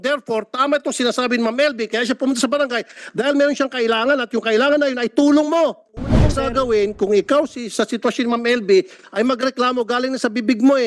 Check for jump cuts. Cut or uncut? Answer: cut